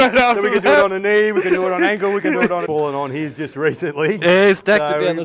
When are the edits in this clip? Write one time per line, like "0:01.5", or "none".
0:02.7